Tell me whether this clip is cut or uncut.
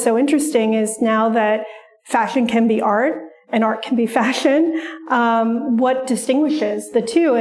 uncut